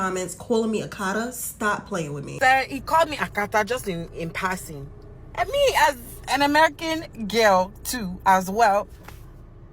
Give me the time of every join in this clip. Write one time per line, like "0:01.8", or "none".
0:02.3